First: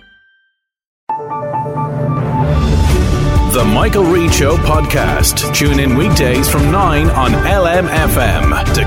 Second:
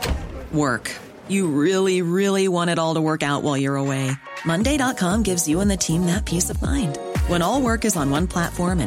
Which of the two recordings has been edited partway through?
first; 1 cut; at 0.9 s

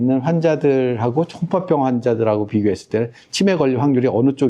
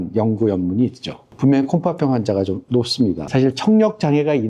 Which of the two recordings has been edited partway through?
second; 1 cut; at 3.2 s

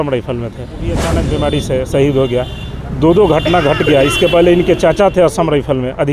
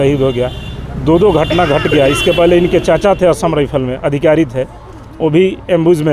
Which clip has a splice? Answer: first; 1 cut; at 1.0 s

